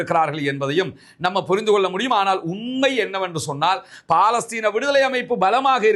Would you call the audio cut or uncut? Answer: uncut